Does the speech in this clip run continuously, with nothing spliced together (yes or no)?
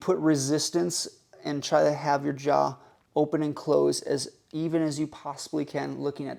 yes